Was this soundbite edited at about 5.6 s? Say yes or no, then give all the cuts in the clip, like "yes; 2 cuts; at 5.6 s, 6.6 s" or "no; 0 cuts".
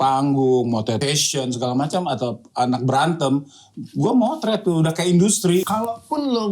yes; 2 cuts; at 1.0 s, 5.6 s